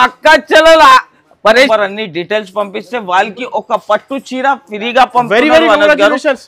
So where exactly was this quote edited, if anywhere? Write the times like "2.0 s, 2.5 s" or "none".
1.7 s